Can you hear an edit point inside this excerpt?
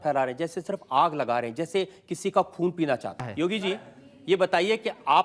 yes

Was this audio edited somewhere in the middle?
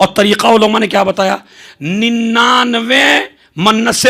no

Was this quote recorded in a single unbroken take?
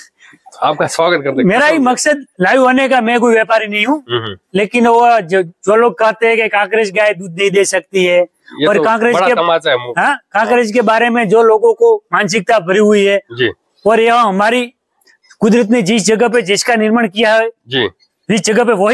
yes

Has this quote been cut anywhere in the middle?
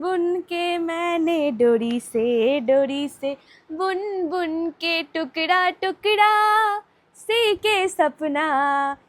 no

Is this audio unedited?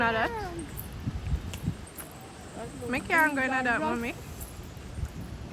yes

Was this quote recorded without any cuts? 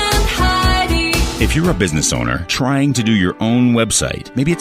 no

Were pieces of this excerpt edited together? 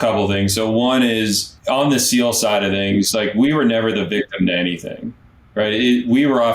yes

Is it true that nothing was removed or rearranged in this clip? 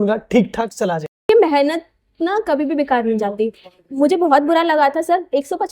no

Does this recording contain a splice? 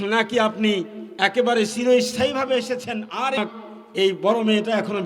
yes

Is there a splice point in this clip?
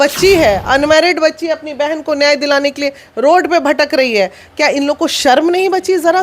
no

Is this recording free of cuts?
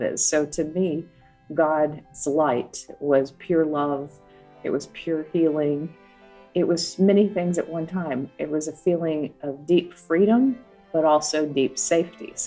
yes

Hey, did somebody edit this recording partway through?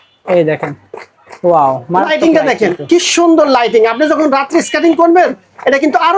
no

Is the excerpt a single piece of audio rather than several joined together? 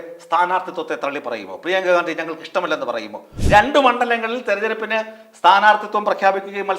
no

